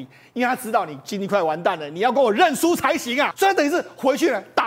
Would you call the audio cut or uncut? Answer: cut